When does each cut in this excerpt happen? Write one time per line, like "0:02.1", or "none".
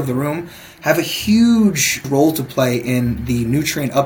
0:02.1